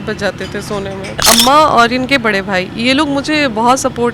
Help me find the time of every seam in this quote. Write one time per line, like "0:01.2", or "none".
0:01.2